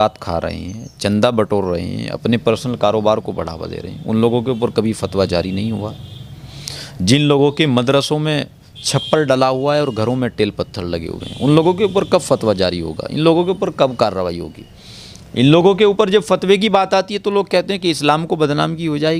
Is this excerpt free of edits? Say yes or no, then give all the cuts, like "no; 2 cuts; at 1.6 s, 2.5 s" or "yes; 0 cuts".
yes; 0 cuts